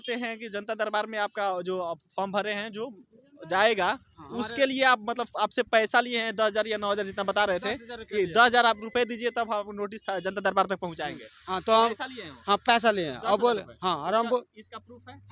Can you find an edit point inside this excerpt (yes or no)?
no